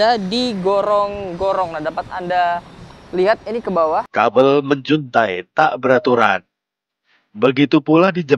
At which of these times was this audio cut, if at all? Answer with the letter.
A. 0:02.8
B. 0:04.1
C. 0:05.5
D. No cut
B